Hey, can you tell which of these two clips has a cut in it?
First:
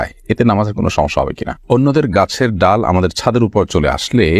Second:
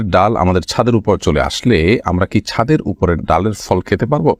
first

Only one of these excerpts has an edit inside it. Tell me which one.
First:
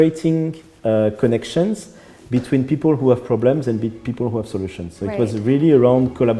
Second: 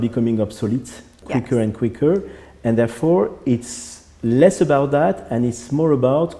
second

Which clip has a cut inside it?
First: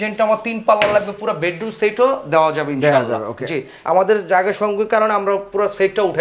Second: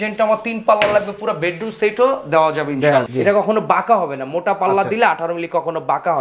second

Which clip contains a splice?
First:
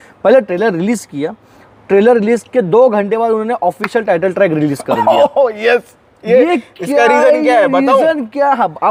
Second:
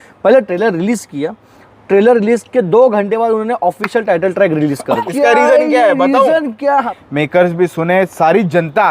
second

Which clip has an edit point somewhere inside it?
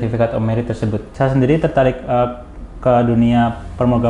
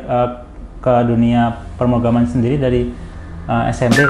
first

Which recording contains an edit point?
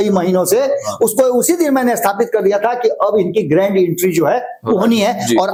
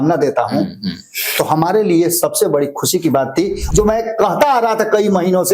second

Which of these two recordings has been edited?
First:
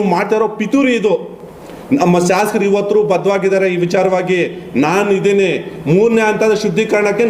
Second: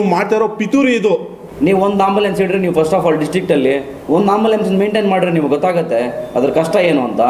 second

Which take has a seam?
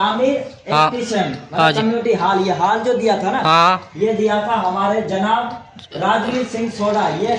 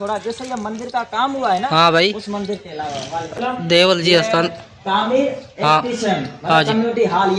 second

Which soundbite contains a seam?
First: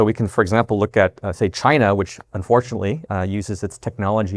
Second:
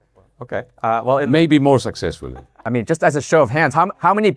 second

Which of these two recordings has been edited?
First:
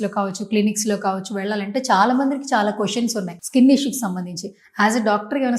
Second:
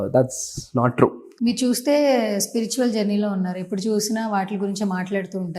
second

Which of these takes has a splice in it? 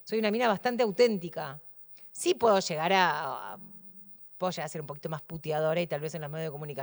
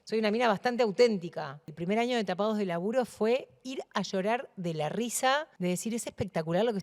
second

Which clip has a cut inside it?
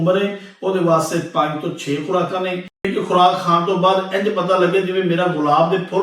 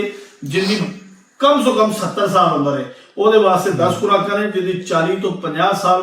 first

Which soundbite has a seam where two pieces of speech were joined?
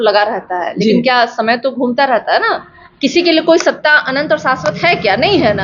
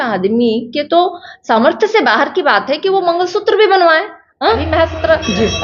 second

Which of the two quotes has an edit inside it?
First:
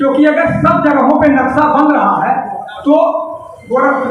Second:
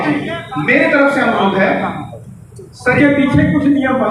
second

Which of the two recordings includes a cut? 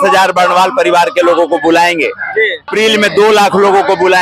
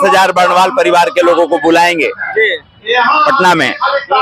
first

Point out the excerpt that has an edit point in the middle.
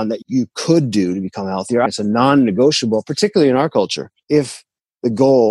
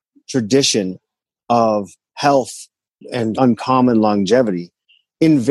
first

